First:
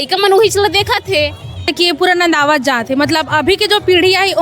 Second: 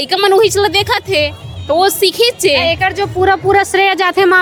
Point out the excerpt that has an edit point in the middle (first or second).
first